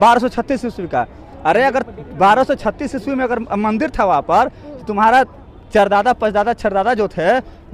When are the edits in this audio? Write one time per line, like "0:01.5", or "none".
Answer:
none